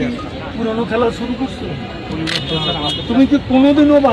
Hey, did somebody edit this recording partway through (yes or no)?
no